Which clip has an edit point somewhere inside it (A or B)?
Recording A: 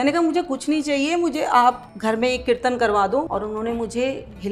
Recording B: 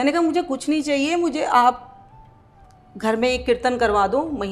A